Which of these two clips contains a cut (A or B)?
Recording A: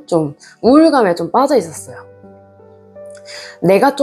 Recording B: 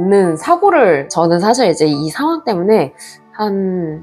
B